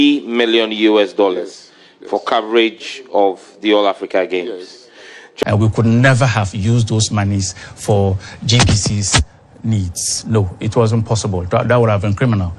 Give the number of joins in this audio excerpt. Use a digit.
1